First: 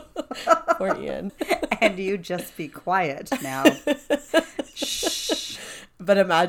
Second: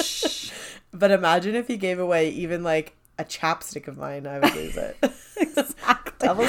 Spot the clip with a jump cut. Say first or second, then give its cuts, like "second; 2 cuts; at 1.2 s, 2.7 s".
first; 1 cut; at 1.3 s